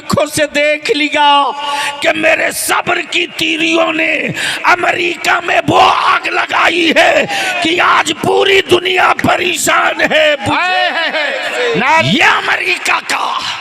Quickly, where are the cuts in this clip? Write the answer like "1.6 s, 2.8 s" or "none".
12.0 s

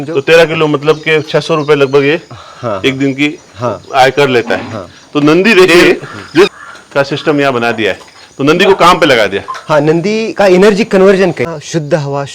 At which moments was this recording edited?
6.5 s, 11.4 s

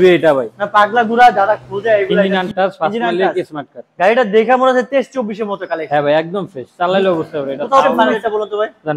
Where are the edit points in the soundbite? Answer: 2.3 s, 8.0 s

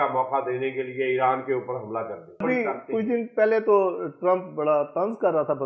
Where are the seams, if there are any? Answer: 2.4 s

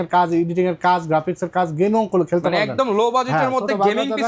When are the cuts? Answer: none

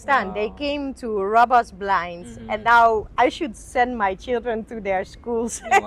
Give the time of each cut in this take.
none

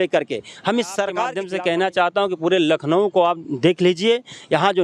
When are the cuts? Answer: 1.4 s

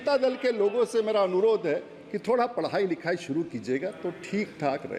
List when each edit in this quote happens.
none

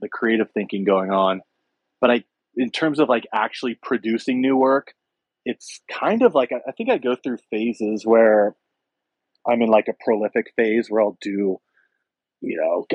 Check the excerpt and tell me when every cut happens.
none

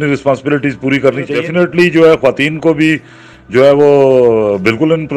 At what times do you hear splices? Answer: 1.4 s

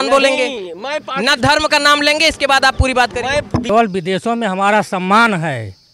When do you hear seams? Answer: 3.7 s

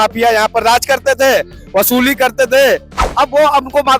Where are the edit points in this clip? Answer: 3.1 s

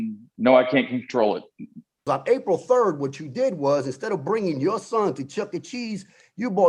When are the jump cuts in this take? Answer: 2.1 s

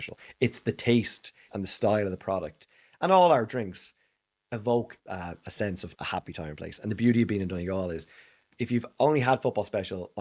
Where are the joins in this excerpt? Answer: 1.5 s, 5.0 s, 5.9 s, 8.5 s

